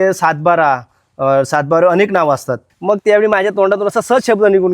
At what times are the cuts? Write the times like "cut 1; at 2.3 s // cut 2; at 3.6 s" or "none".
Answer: cut 1; at 2.6 s